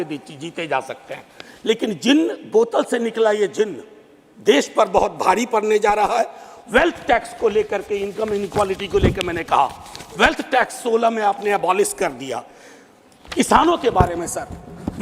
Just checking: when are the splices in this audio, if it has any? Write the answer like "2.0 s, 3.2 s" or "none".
none